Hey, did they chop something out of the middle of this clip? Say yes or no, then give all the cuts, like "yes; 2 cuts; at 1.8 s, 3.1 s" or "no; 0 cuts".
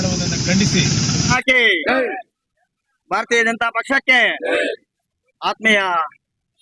yes; 1 cut; at 1.3 s